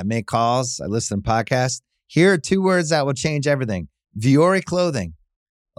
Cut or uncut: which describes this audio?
uncut